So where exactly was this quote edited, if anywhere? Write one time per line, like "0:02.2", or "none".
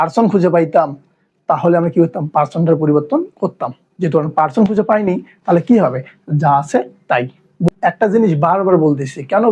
0:07.7